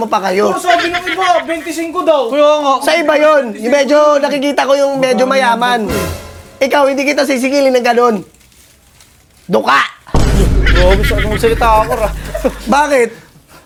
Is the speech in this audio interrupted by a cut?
no; 0 cuts

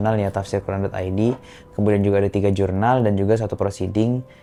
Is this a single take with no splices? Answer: yes; 0 cuts

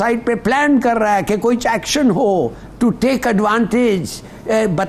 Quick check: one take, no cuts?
yes; 0 cuts

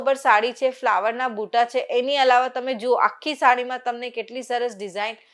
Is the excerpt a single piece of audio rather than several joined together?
yes; 0 cuts

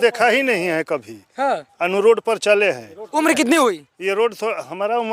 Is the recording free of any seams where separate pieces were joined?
yes; 0 cuts

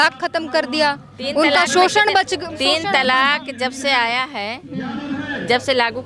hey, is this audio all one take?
yes; 0 cuts

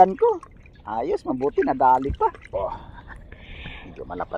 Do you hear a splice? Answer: yes; 1 cut; at 2.4 s

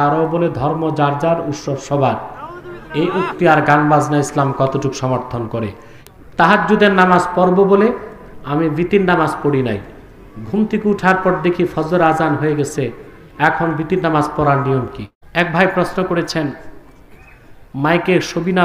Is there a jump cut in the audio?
yes; 2 cuts; at 5.6 s, 15.2 s

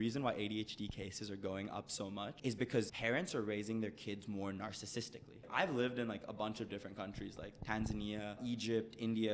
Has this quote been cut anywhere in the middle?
yes; 3 cuts; at 2.5 s, 5.5 s, 8.4 s

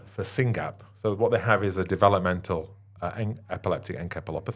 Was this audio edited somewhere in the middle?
no; 0 cuts

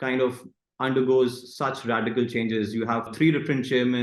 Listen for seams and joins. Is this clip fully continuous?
no; 1 cut; at 3.1 s

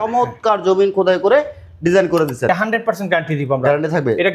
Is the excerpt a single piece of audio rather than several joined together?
no; 1 cut; at 2.5 s

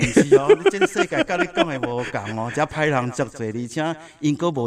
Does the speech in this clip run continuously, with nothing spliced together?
yes; 0 cuts

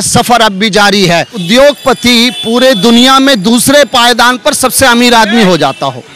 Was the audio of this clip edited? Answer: yes; 1 cut; at 1.4 s

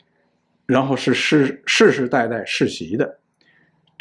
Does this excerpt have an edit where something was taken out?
no; 0 cuts

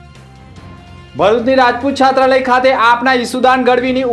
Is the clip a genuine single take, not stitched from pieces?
no; 1 cut; at 1.1 s

